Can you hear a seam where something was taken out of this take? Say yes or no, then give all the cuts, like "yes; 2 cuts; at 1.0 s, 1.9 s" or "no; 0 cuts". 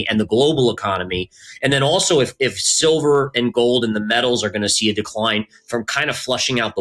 no; 0 cuts